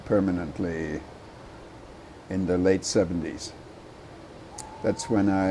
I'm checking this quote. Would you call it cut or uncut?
uncut